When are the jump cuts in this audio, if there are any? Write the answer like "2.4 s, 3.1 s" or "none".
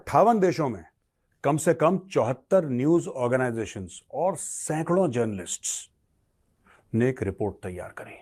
none